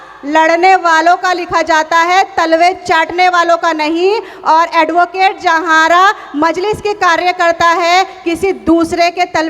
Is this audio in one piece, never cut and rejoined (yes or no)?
yes